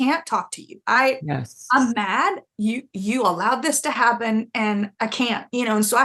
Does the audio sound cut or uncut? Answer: cut